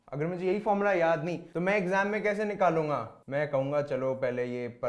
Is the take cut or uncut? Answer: cut